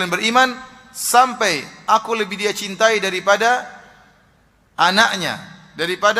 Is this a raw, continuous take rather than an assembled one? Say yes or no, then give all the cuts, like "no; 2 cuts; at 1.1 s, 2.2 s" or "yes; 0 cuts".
yes; 0 cuts